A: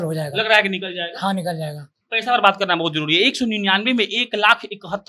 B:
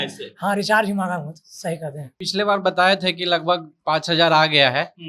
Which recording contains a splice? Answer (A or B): B